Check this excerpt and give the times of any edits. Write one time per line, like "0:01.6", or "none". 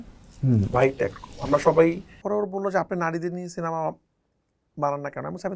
0:02.1